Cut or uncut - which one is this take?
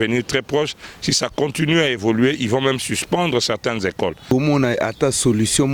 cut